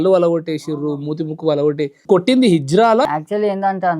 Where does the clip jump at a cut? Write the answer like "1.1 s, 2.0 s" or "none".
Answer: 2.0 s, 3.1 s